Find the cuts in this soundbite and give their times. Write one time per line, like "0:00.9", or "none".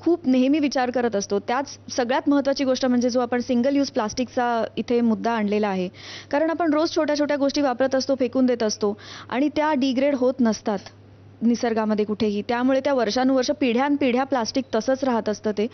none